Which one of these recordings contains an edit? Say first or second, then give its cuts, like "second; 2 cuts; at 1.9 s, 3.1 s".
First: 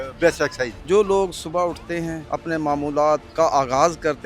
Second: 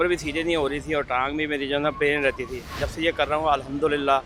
first; 3 cuts; at 0.8 s, 2.2 s, 3.3 s